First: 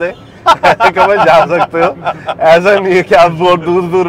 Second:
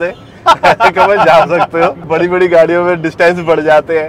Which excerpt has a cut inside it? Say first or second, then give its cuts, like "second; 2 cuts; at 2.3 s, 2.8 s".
second; 1 cut; at 2.0 s